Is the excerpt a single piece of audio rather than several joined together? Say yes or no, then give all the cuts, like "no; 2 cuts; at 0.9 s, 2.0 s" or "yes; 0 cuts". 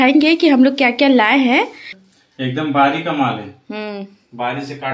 no; 1 cut; at 1.9 s